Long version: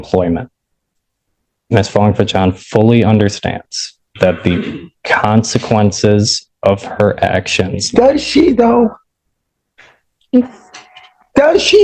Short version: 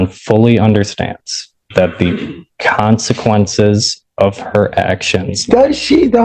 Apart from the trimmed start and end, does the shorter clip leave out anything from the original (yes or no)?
no